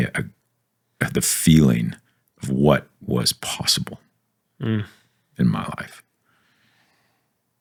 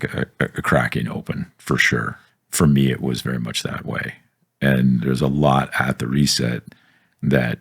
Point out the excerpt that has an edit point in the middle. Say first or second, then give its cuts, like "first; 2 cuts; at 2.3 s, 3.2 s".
second; 1 cut; at 2.2 s